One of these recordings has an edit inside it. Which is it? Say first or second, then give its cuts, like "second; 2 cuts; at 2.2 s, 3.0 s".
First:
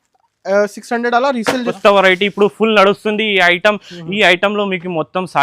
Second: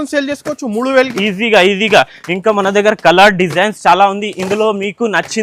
first; 1 cut; at 1.7 s